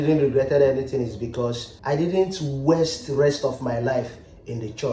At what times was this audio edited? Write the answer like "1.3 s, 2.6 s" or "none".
1.7 s

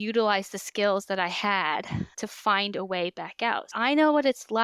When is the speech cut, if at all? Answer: 3.7 s

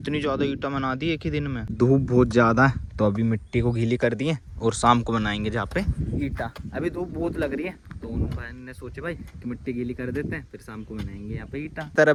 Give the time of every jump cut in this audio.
none

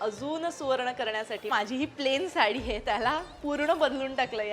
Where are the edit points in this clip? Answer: 1.5 s

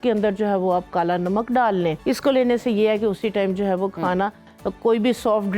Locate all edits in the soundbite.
2.0 s

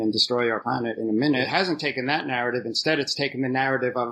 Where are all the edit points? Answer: 1.5 s

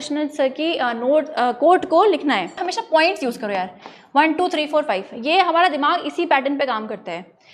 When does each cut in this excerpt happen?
2.7 s

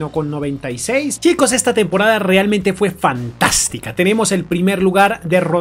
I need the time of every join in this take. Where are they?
1.1 s

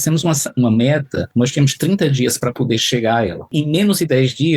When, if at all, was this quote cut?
1.3 s, 3.5 s

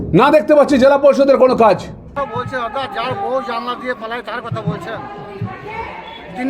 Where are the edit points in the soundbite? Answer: 2.1 s

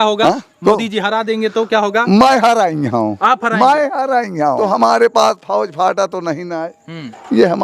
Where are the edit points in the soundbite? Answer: 4.6 s

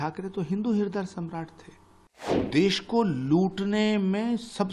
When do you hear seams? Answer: 2.5 s

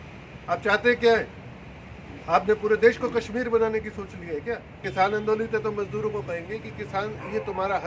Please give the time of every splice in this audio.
4.9 s

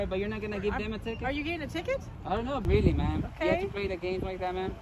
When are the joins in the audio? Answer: 2.6 s

